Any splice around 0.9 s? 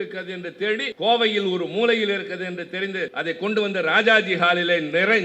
yes; 2 cuts; at 0.9 s, 3.1 s

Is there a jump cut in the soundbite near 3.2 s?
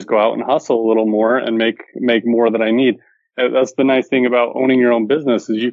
no; 0 cuts

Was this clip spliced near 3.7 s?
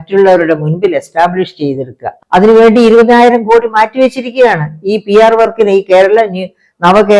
no; 1 cut; at 2.1 s

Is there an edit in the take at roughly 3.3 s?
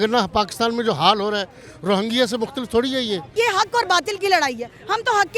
yes; 1 cut; at 3.3 s

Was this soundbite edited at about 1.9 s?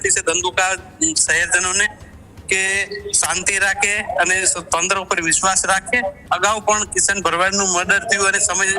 no; 1 cut; at 6.2 s

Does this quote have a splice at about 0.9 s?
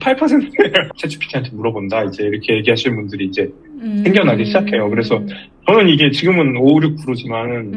yes; 1 cut; at 0.9 s

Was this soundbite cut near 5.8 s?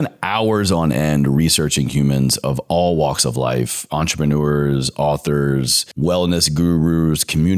yes; 1 cut; at 5.8 s

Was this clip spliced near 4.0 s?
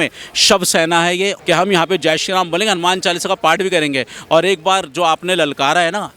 no; 1 cut; at 1.3 s

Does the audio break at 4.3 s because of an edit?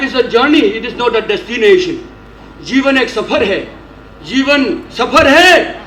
no; 0 cuts

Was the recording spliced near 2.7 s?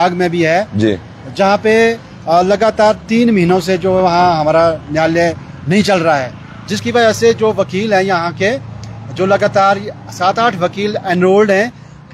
no; 0 cuts

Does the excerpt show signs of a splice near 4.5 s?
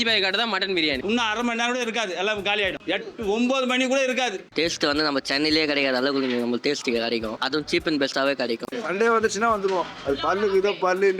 yes; 4 cuts; at 1.0 s, 4.5 s, 7.4 s, 8.7 s

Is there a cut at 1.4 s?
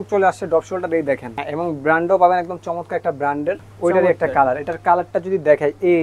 yes; 2 cuts; at 1.4 s, 3.7 s

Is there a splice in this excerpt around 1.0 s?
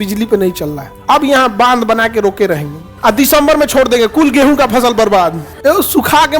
yes; 2 cuts; at 1.0 s, 2.9 s

